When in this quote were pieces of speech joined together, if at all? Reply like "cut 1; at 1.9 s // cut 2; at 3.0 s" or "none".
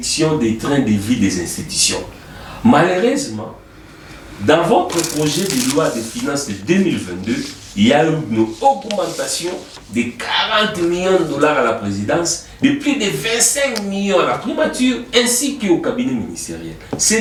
none